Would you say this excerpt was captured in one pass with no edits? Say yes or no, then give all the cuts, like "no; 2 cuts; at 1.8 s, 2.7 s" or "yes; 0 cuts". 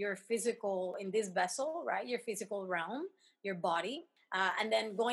no; 2 cuts; at 1.0 s, 4.2 s